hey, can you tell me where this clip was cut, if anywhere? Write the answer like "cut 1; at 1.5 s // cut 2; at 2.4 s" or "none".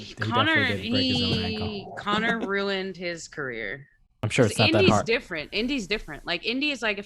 cut 1; at 4.2 s